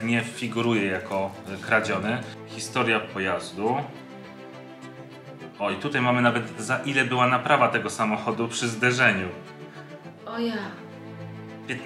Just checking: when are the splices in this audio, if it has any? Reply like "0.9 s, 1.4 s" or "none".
none